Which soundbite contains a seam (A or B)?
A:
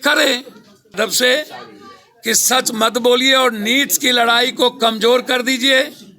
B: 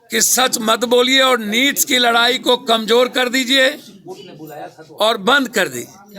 A